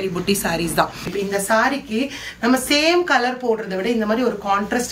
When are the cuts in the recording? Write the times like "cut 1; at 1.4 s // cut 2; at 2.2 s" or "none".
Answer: cut 1; at 1.1 s